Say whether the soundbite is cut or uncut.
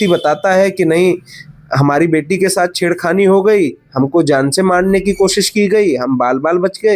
uncut